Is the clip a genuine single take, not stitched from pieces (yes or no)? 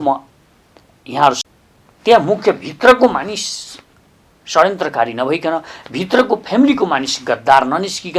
no